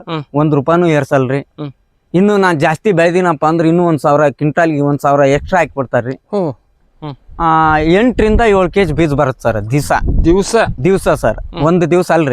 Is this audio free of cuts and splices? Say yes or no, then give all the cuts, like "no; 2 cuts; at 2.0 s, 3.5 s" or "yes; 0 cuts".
no; 1 cut; at 6.9 s